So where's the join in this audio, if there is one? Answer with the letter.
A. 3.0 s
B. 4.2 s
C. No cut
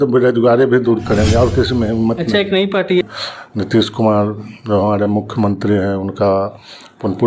A